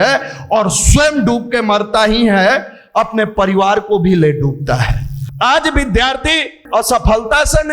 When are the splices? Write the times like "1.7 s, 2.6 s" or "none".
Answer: 5.2 s, 6.6 s